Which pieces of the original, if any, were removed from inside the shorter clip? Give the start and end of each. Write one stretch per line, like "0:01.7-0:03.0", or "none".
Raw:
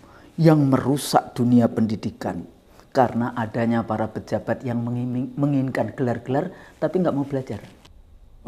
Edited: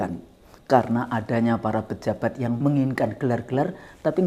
0:04.8-0:05.3